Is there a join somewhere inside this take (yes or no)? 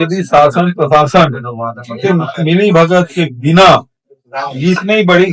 no